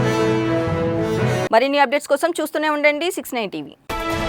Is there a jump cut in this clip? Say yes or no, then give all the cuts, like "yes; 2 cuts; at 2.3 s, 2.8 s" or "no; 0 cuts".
no; 0 cuts